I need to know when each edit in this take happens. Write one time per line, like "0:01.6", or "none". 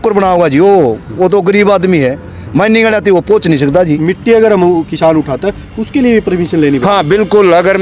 0:04.0

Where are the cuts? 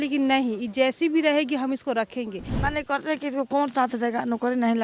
0:02.4

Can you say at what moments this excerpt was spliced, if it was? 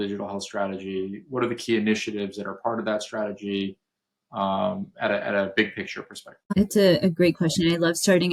none

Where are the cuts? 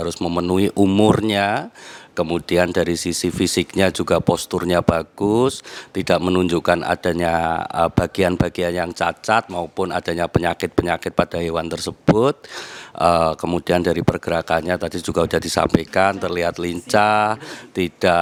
none

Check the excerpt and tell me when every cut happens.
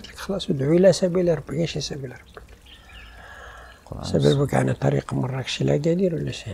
none

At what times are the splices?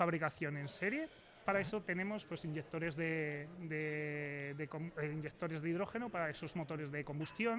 0:01.4

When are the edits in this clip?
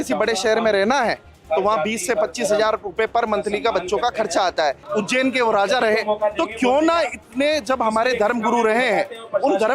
0:04.8

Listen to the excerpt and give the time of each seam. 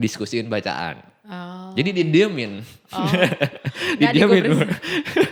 none

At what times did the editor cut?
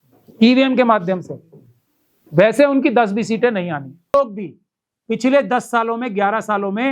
0:04.1

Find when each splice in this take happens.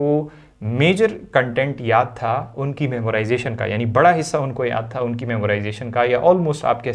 none

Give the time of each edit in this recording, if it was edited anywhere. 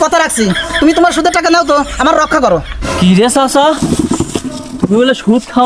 none

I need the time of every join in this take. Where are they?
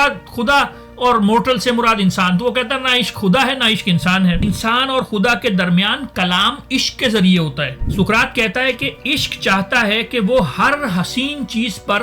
0:04.4
0:07.8

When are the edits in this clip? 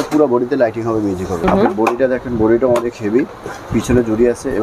0:01.4

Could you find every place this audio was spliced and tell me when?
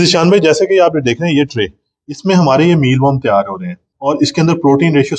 0:03.9

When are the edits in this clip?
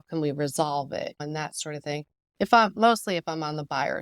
0:01.2
0:02.7

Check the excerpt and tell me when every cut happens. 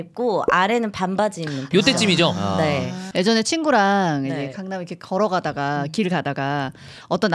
0:03.1

